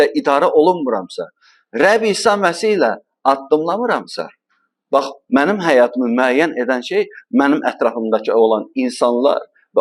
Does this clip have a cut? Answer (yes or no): no